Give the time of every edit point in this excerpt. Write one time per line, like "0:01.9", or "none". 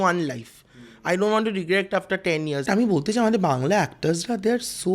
0:02.6